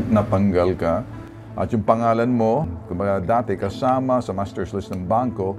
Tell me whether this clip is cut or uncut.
cut